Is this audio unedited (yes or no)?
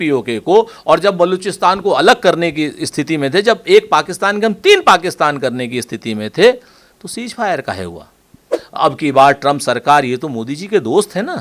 no